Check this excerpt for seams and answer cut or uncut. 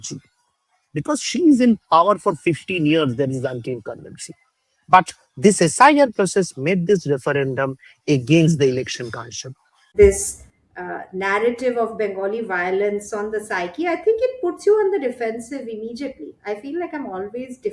cut